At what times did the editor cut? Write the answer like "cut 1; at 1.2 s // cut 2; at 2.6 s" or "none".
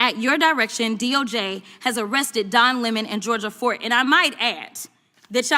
cut 1; at 3.8 s